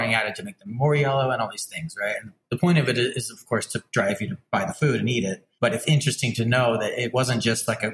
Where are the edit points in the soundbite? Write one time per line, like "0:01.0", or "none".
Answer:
0:02.4
0:04.4
0:05.4
0:07.1